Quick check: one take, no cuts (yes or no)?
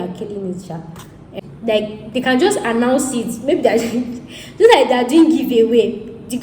no